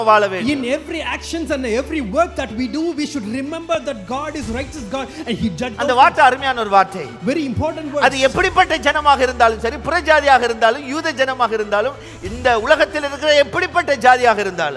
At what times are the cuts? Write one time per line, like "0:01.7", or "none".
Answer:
0:05.7

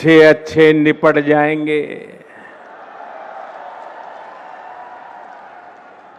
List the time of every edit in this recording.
none

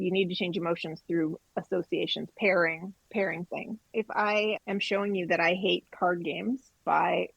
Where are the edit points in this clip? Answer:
0:03.8

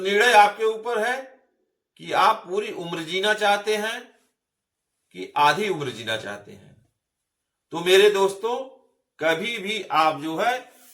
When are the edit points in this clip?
none

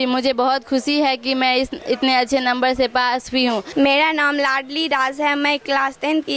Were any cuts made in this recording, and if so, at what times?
0:03.7

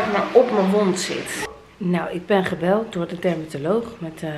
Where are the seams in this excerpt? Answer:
0:01.3

